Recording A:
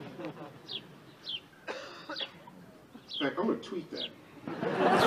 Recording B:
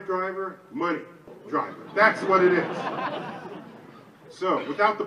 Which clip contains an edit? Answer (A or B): B